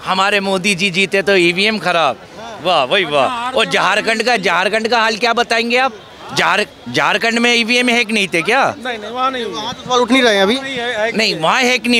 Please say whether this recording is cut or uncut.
uncut